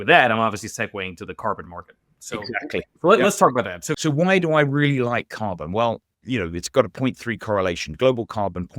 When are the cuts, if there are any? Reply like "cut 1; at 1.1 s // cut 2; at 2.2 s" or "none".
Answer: cut 1; at 3.8 s // cut 2; at 6.1 s

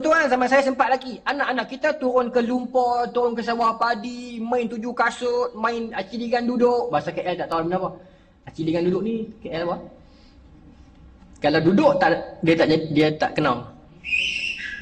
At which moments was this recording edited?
none

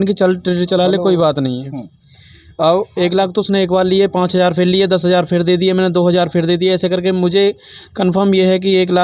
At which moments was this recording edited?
none

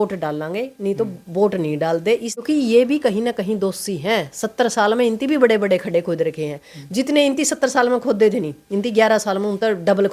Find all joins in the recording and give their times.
cut 1; at 2.4 s

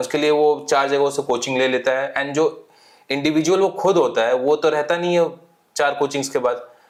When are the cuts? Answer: none

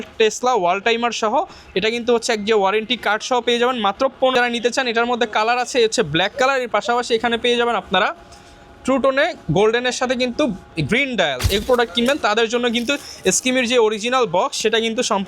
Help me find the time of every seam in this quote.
cut 1; at 4.3 s // cut 2; at 11.6 s

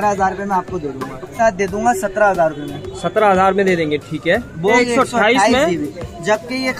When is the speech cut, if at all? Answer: cut 1; at 1.3 s // cut 2; at 4.8 s

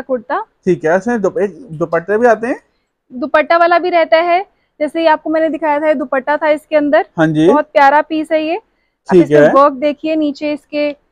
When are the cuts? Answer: none

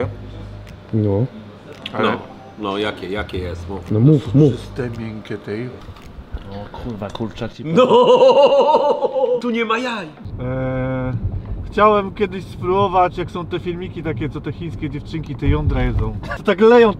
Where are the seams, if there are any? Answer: cut 1; at 5.9 s // cut 2; at 10.2 s

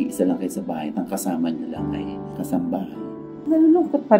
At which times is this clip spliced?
cut 1; at 3.3 s

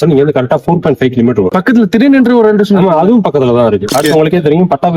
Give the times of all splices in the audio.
cut 1; at 1.5 s // cut 2; at 3.9 s

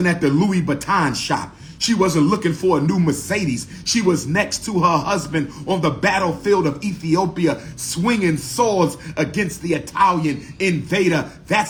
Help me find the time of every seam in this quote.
none

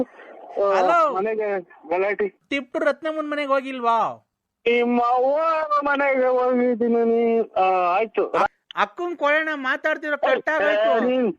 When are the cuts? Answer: cut 1; at 2.4 s // cut 2; at 8.5 s

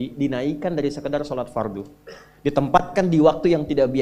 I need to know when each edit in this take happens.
none

